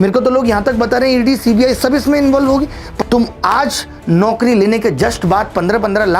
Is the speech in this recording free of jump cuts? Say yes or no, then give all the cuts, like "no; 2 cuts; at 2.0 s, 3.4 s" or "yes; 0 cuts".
no; 1 cut; at 2.9 s